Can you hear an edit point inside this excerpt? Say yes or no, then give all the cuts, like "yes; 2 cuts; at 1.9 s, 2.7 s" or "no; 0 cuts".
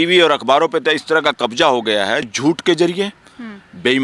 yes; 1 cut; at 2.3 s